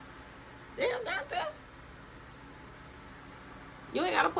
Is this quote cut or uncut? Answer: uncut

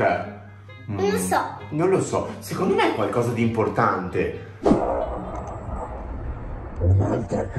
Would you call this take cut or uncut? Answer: cut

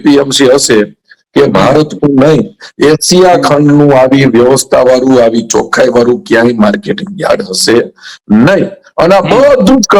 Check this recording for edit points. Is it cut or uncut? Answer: uncut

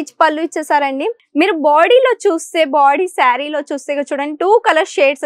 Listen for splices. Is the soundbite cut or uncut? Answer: cut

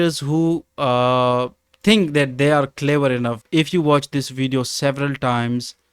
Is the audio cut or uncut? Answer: cut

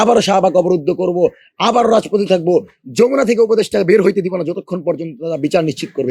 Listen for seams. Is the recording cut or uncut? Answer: uncut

